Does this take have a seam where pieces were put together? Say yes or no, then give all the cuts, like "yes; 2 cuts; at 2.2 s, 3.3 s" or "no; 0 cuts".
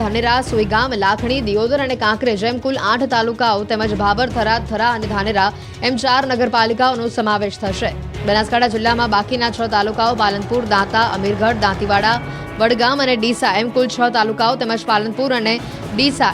yes; 1 cut; at 5.3 s